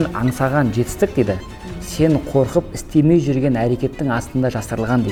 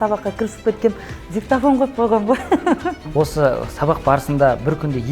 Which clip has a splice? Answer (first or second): second